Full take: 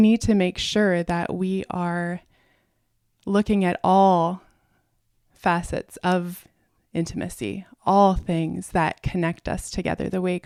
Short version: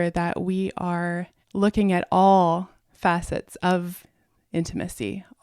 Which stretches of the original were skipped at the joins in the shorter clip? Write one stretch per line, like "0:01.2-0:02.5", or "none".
0:02.3-0:03.1
0:04.5-0:05.2